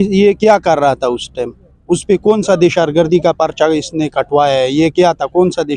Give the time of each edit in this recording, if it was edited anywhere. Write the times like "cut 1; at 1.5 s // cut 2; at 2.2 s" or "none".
none